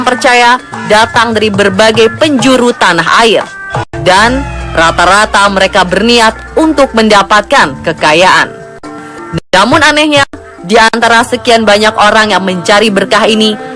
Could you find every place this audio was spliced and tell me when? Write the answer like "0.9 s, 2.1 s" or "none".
12.7 s